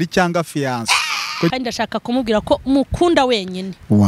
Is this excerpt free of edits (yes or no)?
no